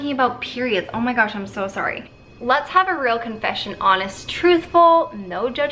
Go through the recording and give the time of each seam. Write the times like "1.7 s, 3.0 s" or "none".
2.0 s